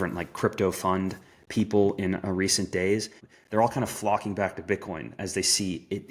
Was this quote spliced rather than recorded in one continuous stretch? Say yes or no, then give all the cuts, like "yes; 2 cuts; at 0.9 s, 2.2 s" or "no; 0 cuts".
yes; 1 cut; at 3.2 s